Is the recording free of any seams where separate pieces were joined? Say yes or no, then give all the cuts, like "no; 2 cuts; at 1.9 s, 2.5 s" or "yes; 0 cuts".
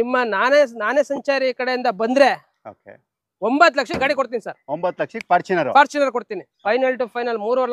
no; 1 cut; at 6.4 s